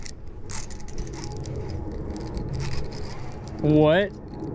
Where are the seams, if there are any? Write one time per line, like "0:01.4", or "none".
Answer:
none